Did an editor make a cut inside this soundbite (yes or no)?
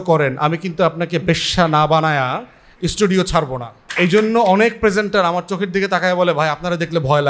yes